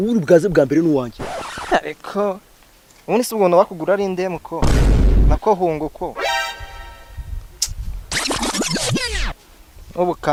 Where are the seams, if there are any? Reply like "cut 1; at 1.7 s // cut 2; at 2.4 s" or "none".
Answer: none